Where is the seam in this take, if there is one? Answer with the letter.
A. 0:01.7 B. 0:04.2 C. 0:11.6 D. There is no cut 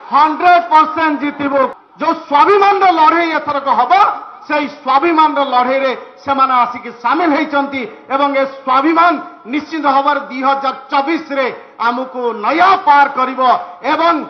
A